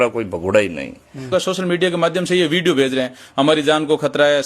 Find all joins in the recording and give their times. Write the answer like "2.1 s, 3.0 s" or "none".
1.3 s